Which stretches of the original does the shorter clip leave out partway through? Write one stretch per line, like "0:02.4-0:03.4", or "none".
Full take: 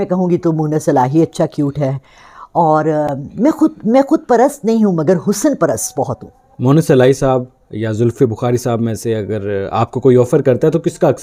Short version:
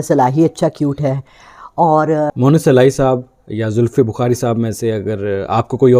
0:03.1-0:06.6

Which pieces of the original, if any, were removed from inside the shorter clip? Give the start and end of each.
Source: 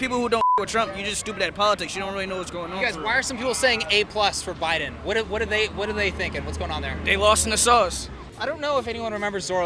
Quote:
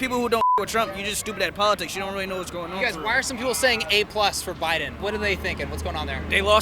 0:05.0-0:05.7

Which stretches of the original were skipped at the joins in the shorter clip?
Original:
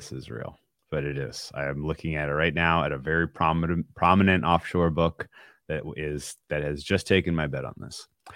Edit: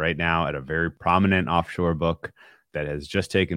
0:03.3-0:03.9
0:05.5-0:06.3

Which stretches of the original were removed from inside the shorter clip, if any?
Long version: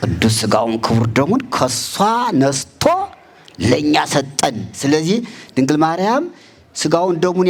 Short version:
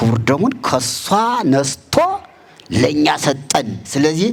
none

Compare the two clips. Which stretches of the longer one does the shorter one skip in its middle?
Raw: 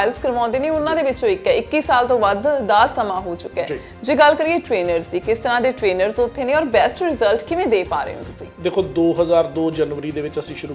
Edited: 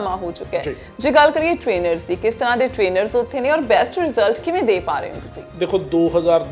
none

